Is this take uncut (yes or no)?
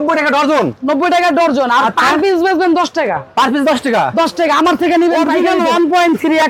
no